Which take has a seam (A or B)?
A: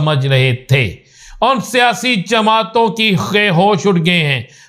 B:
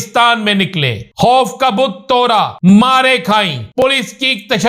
B